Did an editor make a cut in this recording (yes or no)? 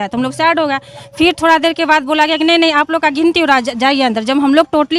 no